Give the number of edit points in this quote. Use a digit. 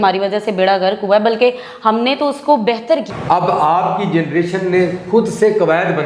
1